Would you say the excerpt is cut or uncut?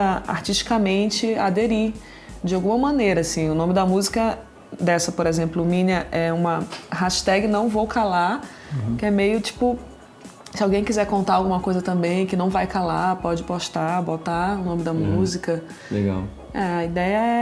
uncut